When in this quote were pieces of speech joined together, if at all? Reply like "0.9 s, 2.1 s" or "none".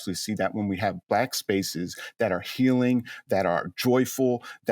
1.0 s